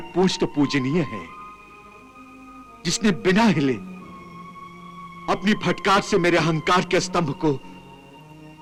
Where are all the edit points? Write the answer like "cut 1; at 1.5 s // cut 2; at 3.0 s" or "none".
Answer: none